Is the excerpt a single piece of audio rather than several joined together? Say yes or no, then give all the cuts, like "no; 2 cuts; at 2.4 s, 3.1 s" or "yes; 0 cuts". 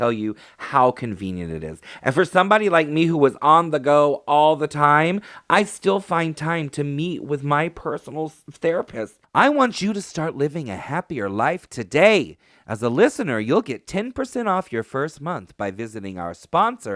no; 1 cut; at 9.2 s